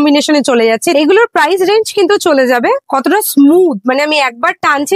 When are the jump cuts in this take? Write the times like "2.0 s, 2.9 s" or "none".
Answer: 0.9 s, 2.9 s